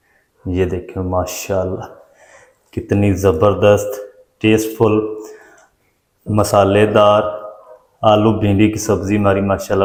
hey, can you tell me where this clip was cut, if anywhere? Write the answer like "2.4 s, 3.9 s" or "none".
none